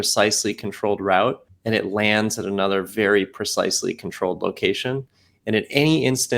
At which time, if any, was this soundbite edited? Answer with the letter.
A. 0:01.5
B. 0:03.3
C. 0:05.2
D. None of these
A